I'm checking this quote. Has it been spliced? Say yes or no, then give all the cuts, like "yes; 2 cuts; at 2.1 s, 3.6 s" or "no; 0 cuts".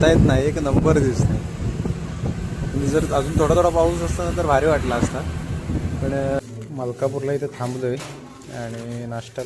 yes; 1 cut; at 6.4 s